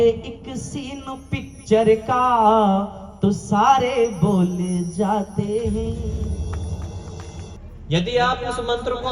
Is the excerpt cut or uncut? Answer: cut